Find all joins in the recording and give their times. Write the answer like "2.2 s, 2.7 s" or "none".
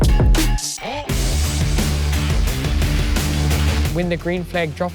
1.0 s